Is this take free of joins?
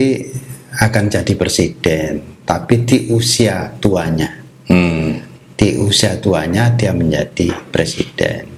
yes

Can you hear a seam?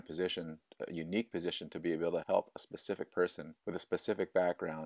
yes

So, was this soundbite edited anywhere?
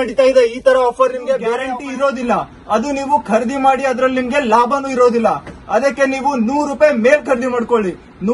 yes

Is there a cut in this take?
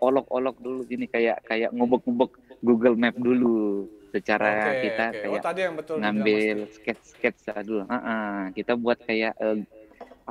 no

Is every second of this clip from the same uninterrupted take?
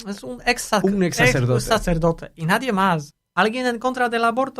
no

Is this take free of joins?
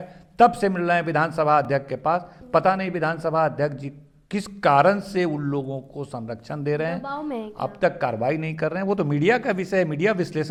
yes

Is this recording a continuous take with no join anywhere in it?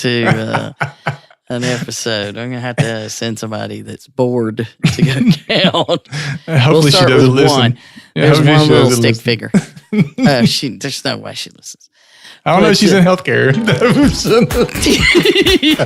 no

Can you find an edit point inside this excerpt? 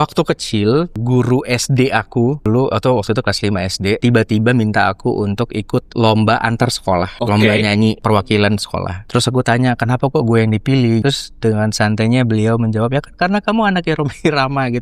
yes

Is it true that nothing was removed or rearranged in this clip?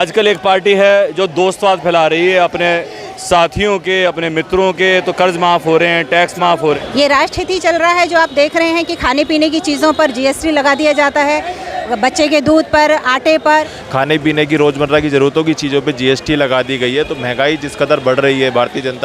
no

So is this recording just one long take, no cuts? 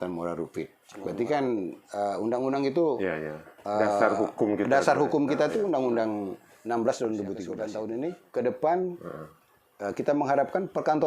no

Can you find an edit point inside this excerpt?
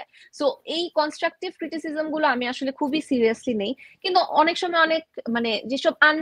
no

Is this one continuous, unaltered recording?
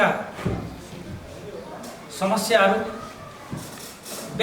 yes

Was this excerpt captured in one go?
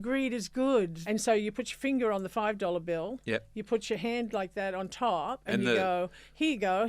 no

